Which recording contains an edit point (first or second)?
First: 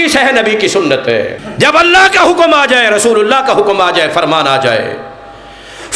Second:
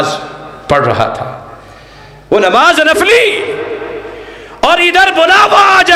first